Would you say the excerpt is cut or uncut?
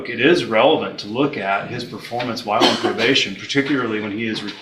uncut